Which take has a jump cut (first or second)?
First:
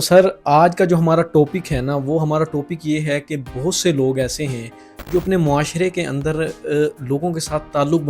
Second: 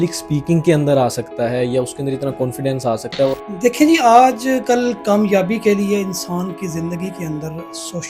second